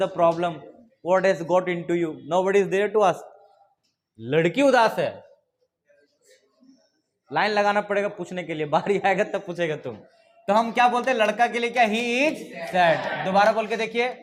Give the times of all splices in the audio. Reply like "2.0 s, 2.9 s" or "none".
none